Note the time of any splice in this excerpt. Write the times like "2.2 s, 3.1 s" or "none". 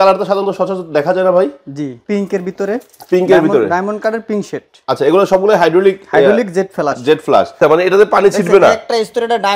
2.0 s, 7.6 s